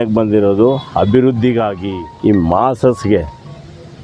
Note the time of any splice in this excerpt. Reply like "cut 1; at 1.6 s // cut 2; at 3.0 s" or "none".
cut 1; at 1.8 s